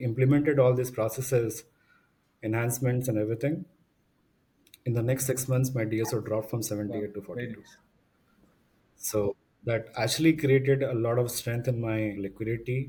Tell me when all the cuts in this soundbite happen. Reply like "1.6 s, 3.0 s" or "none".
none